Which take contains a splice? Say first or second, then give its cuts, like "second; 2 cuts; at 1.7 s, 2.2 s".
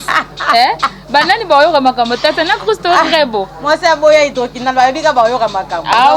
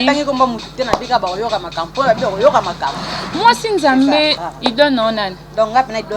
second; 1 cut; at 4.4 s